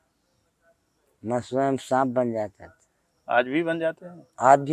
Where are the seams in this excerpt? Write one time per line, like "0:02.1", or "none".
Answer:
none